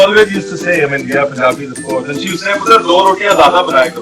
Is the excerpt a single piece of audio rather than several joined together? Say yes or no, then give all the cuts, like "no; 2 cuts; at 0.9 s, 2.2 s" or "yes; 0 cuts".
yes; 0 cuts